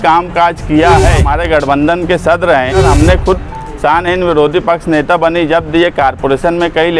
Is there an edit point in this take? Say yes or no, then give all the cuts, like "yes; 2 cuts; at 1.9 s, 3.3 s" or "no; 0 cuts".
yes; 2 cuts; at 1.3 s, 2.8 s